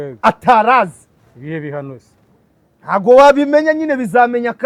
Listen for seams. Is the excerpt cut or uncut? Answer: uncut